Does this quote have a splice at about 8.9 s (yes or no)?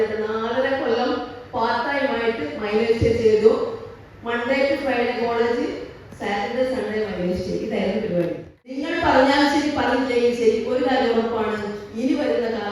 yes